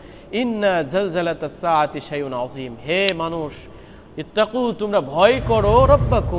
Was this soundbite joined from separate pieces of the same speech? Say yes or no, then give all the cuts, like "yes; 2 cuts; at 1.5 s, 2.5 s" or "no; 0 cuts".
no; 0 cuts